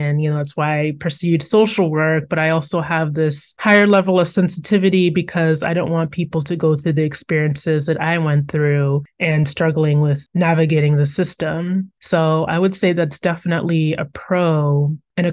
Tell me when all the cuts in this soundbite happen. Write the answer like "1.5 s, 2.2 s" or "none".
none